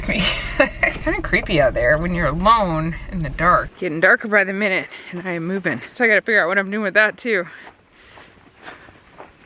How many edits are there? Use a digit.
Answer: 3